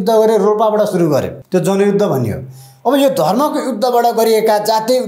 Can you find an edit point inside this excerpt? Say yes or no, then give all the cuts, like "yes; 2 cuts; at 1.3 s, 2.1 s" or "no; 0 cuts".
yes; 1 cut; at 1.4 s